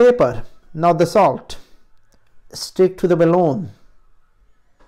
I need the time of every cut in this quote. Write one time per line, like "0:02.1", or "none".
none